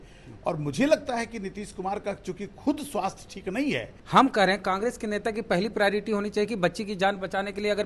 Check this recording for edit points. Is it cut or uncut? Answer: cut